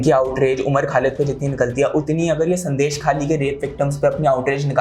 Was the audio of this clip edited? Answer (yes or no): no